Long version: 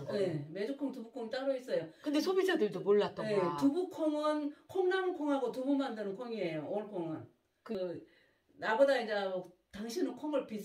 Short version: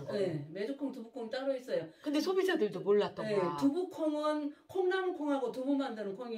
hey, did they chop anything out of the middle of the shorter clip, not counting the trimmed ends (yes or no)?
no